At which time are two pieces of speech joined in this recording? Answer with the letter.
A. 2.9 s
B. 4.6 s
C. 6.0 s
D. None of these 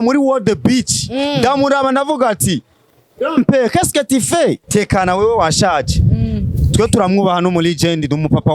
B